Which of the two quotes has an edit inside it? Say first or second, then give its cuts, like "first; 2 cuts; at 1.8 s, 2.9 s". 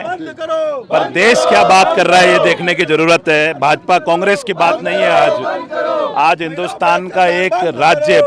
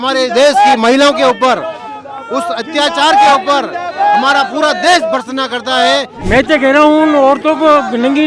second; 1 cut; at 6.1 s